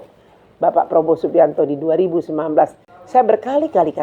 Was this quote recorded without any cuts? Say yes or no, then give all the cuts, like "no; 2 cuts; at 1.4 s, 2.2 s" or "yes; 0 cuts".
no; 1 cut; at 2.9 s